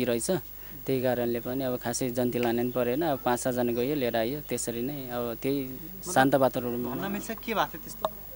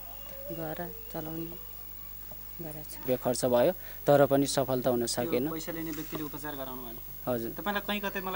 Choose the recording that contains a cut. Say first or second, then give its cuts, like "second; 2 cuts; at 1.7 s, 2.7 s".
second; 1 cut; at 3.0 s